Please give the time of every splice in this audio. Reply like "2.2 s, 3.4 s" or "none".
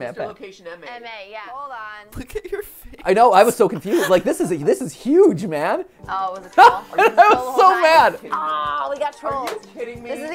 2.1 s, 5.9 s